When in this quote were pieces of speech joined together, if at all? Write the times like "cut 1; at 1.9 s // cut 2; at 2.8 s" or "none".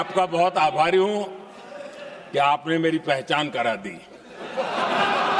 none